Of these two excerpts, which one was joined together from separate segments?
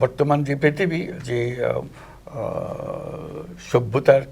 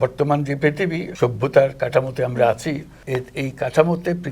second; 2 cuts; at 1.1 s, 2.9 s

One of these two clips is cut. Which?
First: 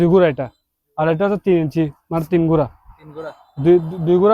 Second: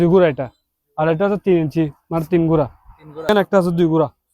second; 1 cut; at 3.3 s

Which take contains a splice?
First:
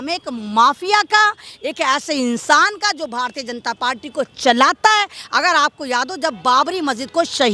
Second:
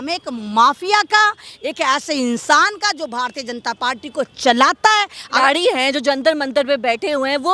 second; 1 cut; at 5.4 s

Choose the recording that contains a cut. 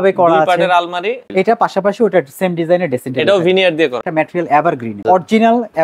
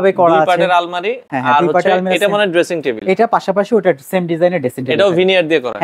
first; 3 cuts; at 1.2 s, 4.0 s, 5.0 s

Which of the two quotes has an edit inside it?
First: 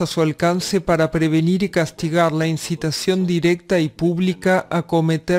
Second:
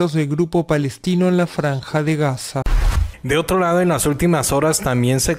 second; 1 cut; at 2.6 s

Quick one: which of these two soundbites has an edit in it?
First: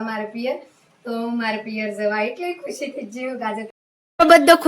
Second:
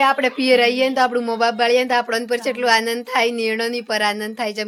first; 1 cut; at 3.7 s

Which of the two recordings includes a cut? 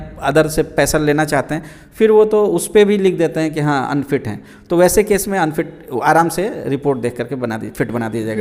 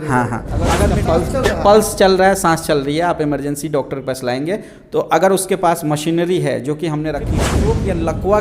second; 2 cuts; at 0.8 s, 7.5 s

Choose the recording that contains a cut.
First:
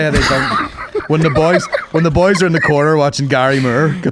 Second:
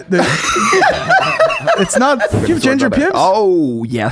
second; 1 cut; at 2.4 s

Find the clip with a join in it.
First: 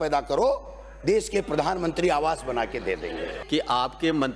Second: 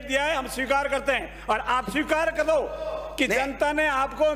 first; 1 cut; at 3.4 s

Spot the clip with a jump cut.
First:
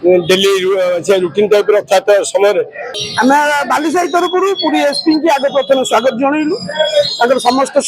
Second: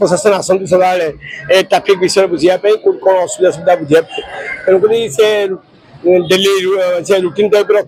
first; 1 cut; at 2.8 s

